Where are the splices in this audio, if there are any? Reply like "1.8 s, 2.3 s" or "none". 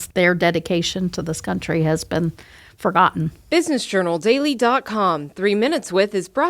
3.4 s